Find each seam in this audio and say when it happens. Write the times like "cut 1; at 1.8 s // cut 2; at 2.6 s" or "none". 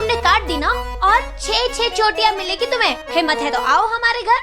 none